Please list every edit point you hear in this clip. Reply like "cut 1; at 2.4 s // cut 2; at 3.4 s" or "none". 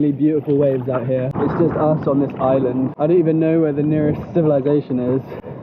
cut 1; at 1.3 s // cut 2; at 2.9 s